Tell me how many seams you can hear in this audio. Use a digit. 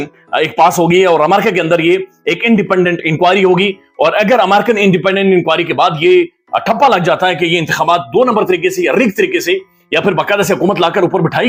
0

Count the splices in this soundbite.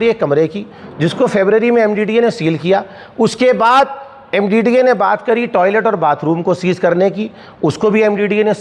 0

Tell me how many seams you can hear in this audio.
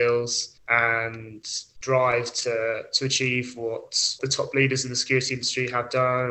1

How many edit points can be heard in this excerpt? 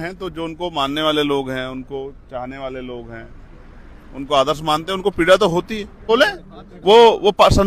1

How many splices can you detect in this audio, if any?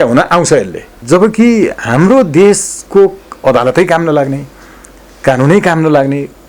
1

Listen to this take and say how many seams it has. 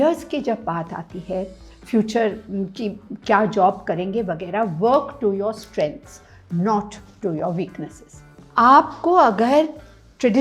1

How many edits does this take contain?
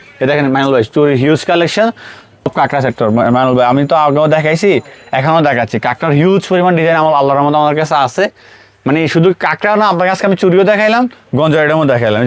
1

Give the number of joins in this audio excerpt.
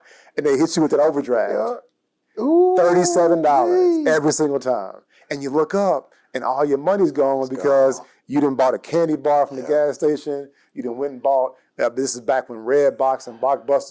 0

